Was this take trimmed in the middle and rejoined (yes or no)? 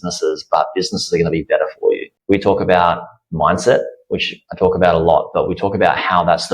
yes